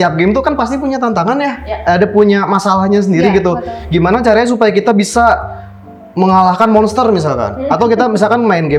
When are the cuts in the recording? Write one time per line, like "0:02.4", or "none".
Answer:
none